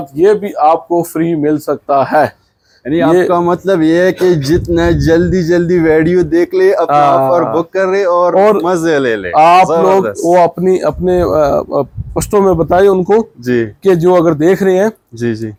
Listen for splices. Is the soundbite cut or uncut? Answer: uncut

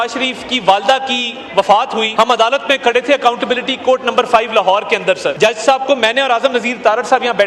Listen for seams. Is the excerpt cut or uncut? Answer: cut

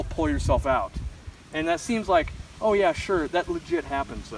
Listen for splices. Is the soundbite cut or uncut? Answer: uncut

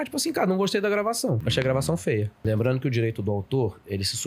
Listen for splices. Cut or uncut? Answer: cut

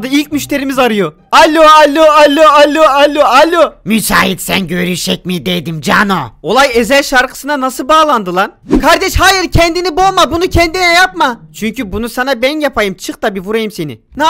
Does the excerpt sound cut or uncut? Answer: cut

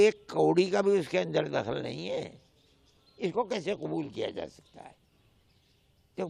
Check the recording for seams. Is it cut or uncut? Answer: uncut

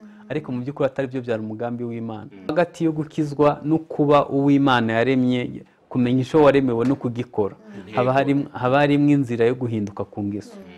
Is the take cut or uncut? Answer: cut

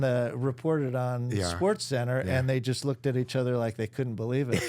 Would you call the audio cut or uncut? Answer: uncut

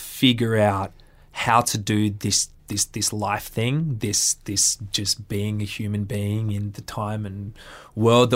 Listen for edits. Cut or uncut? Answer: cut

